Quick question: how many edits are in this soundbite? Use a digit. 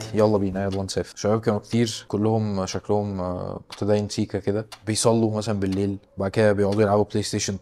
2